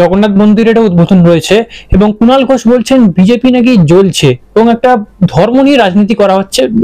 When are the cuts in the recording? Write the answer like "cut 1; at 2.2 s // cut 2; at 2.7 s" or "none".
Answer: none